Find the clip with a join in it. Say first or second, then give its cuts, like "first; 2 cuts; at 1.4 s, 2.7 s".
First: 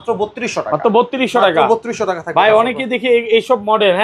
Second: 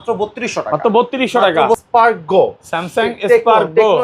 second; 1 cut; at 1.8 s